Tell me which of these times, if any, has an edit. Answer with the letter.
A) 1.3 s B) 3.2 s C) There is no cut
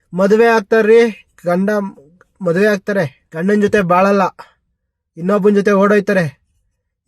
B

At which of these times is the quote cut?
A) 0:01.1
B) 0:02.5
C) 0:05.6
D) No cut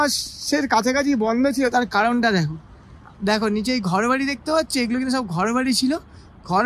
D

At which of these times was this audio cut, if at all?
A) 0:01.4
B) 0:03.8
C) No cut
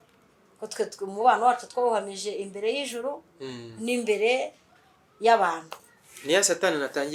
C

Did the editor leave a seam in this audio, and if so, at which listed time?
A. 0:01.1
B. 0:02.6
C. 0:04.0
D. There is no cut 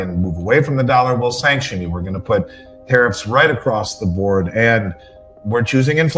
D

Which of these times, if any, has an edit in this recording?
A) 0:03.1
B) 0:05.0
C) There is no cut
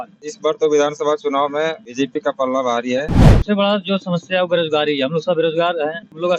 A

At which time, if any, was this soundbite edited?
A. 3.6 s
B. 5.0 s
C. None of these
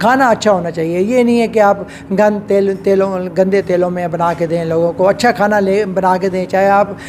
C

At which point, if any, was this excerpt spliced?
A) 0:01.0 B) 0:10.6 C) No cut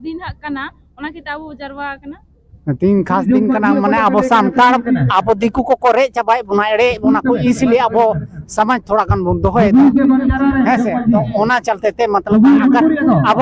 C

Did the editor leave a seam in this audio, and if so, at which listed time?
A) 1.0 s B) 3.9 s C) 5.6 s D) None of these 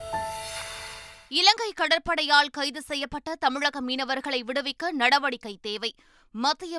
A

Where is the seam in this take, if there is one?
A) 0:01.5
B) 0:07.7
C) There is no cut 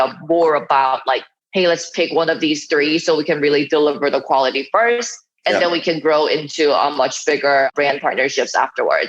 B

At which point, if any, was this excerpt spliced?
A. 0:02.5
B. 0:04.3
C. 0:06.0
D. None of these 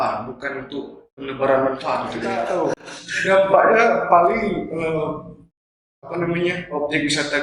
A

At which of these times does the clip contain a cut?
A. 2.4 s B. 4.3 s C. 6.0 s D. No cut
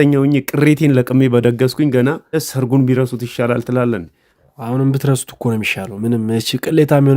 A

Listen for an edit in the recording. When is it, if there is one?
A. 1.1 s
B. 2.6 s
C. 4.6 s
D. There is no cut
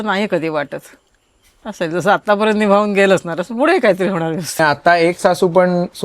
C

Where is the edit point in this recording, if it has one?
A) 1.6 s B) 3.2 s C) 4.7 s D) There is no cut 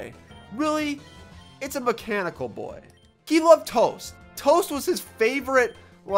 B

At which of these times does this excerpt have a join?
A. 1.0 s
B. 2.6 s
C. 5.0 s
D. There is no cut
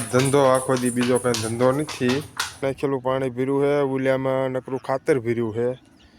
B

